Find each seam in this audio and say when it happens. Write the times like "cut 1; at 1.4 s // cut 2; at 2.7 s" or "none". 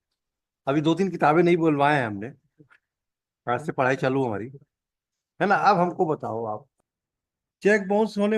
cut 1; at 6.7 s